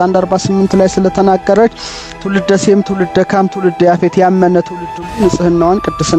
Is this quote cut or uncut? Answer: uncut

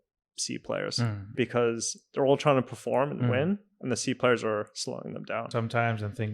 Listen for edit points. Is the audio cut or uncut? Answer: cut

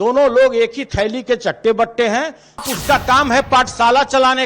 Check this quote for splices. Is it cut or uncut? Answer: cut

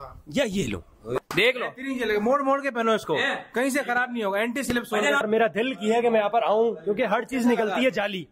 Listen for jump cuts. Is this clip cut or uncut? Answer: cut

